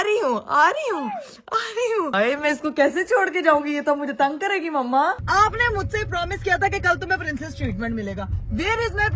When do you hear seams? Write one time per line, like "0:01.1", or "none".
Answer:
0:02.1
0:05.2